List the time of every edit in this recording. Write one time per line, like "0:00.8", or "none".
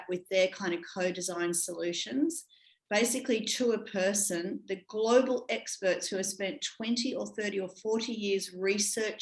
none